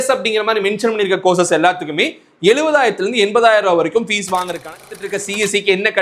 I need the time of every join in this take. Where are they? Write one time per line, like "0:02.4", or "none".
0:04.9